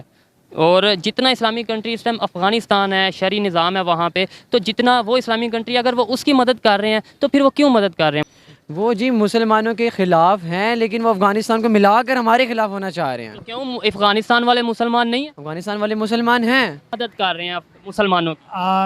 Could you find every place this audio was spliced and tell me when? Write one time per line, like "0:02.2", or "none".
0:08.3
0:17.0

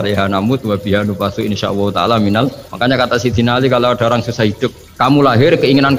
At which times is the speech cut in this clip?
0:02.6
0:04.8

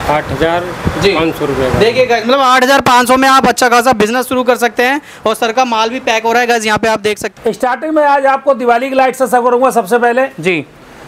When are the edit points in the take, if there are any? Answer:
0:07.3

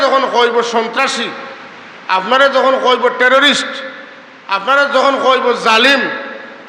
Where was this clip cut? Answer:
none

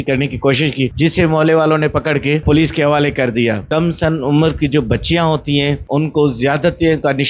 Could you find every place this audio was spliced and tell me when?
0:00.9
0:02.4
0:03.6
0:05.8

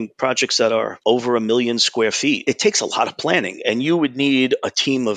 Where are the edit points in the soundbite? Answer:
0:00.9
0:02.4

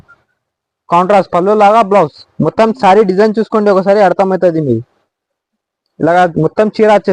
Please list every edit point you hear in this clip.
none

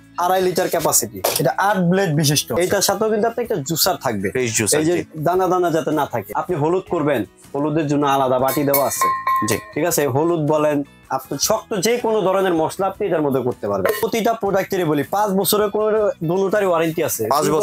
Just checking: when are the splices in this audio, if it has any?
0:01.2
0:02.6
0:06.2
0:14.0

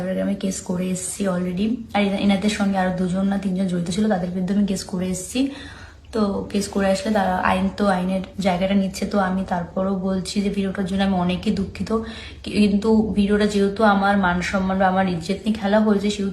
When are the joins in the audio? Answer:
0:06.3

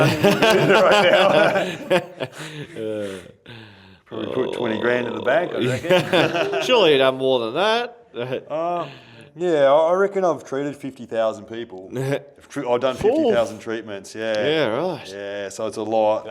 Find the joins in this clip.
none

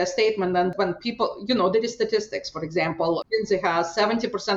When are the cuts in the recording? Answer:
0:00.7
0:03.2

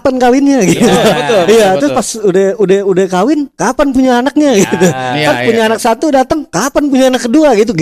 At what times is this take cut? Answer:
none

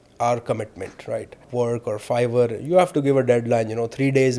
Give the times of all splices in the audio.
0:01.5

